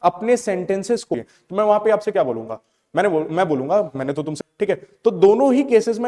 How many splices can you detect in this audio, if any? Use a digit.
2